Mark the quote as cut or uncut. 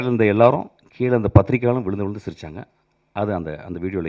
uncut